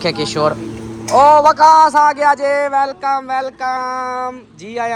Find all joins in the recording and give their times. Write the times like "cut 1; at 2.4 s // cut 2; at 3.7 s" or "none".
none